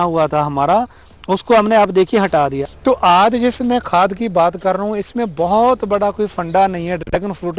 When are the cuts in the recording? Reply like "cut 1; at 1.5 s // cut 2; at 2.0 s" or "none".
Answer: cut 1; at 2.6 s